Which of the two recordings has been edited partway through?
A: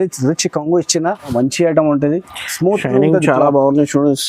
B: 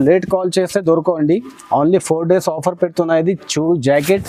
A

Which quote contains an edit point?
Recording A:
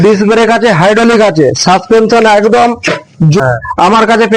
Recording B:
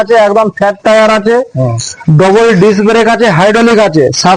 A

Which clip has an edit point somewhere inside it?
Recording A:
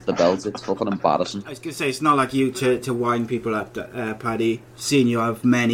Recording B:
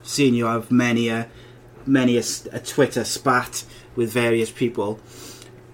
A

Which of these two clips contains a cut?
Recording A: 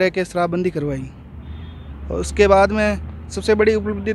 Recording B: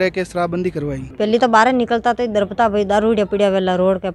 B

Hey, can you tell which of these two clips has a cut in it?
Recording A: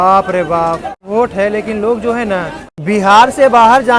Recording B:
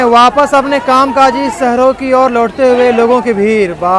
A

